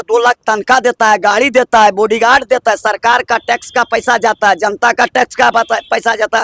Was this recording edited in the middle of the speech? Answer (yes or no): no